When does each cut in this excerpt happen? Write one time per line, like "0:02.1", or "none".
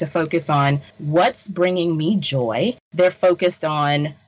0:00.9
0:02.8